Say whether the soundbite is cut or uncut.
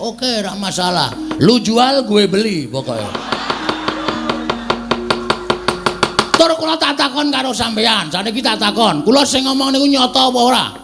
uncut